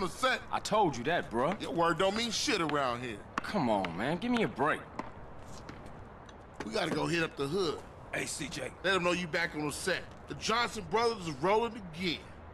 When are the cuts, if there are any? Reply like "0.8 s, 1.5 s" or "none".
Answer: none